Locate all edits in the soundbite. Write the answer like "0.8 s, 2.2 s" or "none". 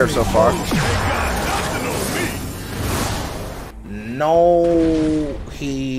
3.7 s